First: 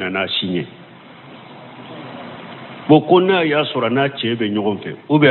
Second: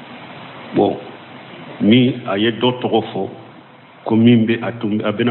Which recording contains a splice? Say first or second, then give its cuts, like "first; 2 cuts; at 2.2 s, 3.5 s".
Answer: first; 1 cut; at 3.4 s